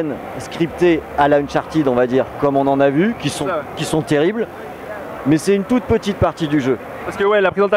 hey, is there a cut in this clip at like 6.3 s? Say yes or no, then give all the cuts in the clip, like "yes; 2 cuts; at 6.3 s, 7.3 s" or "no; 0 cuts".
no; 1 cut; at 1.1 s